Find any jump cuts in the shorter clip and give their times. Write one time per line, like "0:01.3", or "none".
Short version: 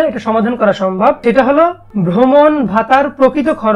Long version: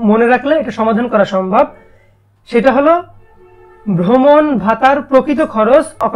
0:01.2
0:01.8